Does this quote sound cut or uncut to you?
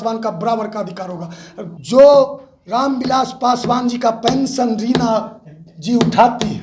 cut